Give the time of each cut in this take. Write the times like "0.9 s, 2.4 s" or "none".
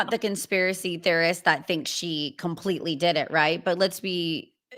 none